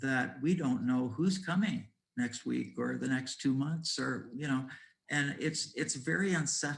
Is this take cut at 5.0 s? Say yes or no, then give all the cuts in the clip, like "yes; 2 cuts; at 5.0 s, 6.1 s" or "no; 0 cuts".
no; 0 cuts